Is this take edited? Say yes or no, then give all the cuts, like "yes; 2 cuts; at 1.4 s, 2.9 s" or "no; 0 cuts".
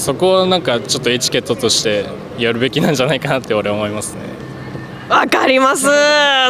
no; 0 cuts